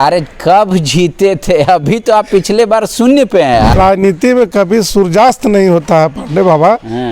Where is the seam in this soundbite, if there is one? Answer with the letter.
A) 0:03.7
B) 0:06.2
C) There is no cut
A